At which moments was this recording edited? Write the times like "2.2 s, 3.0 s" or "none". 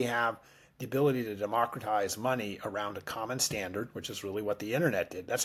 none